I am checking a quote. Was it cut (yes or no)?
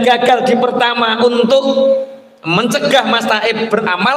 no